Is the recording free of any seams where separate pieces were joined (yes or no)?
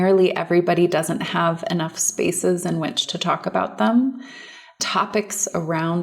no